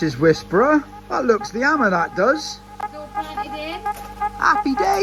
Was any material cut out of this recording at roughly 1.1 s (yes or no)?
no